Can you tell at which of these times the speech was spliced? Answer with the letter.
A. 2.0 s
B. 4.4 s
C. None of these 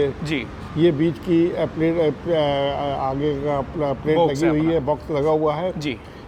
C